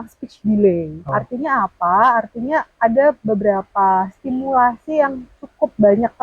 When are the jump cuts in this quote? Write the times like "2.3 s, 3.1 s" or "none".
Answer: 1.0 s